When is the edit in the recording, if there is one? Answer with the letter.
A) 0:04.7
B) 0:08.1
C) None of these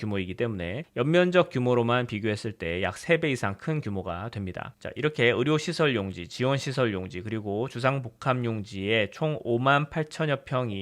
A